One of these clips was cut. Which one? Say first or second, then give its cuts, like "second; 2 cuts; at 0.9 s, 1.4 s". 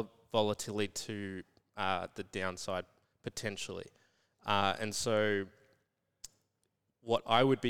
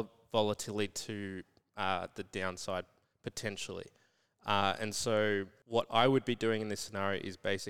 second; 1 cut; at 5.6 s